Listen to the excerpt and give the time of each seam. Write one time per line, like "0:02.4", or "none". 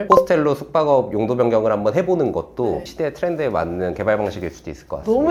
none